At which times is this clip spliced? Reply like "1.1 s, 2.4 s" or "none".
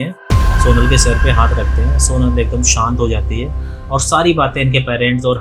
none